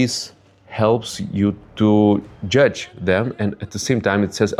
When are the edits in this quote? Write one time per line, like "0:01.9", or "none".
none